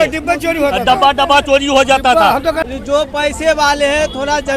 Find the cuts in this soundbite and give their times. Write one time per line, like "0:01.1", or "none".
0:02.6